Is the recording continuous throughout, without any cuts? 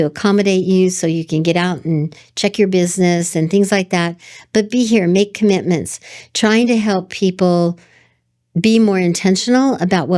yes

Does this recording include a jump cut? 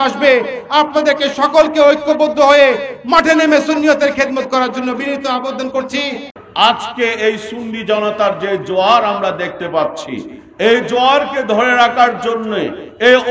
yes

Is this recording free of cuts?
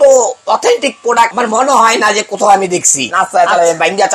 no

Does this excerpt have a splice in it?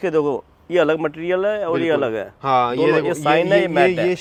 no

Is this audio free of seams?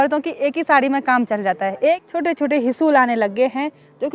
no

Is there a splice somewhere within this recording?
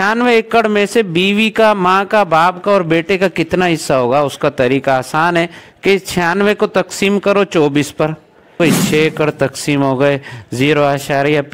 yes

